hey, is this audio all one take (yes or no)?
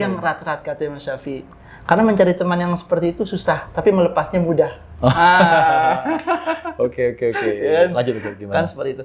yes